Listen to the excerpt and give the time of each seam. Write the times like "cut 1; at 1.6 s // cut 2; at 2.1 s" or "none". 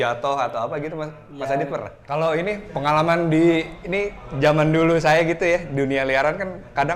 cut 1; at 2.0 s